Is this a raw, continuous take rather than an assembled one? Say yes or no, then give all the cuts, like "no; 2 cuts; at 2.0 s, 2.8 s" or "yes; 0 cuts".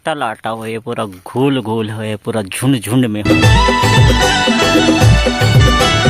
yes; 0 cuts